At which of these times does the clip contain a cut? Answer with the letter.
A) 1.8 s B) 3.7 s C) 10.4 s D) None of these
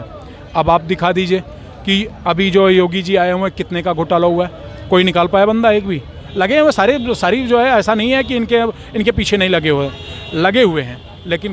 D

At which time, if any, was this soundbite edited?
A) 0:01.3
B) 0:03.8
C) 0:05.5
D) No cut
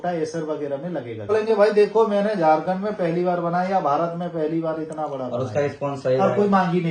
A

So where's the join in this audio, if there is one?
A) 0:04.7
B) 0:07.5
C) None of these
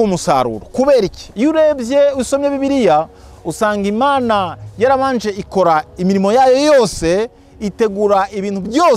C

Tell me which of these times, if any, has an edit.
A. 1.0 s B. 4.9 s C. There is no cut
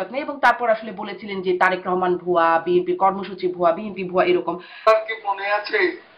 B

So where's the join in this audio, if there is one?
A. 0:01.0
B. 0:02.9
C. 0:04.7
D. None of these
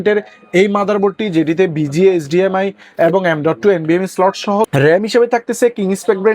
C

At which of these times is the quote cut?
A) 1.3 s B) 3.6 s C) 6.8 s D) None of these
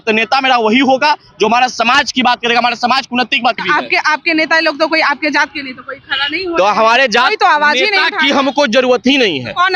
B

